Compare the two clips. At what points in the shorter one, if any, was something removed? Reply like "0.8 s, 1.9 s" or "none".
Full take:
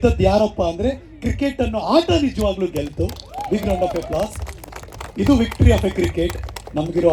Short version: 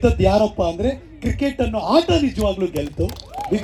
none